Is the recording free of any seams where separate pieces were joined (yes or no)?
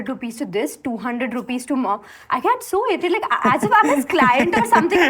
yes